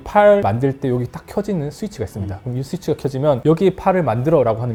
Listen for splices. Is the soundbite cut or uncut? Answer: uncut